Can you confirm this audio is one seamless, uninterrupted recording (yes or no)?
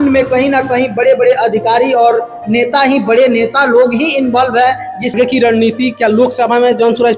no